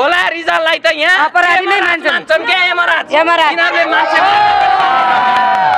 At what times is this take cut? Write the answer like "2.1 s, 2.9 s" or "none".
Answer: none